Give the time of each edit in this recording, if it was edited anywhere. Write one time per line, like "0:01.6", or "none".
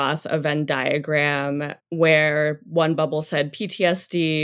0:01.8